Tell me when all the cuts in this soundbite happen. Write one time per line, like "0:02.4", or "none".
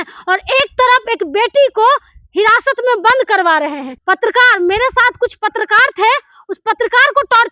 0:03.9